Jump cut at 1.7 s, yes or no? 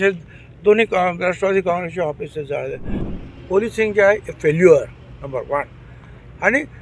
no